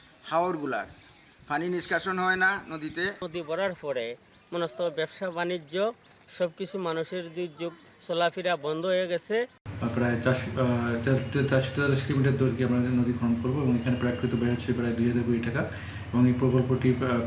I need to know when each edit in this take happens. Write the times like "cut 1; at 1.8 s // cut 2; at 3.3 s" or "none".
cut 1; at 3.2 s // cut 2; at 9.6 s